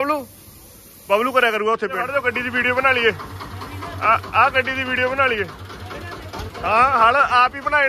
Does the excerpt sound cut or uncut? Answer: cut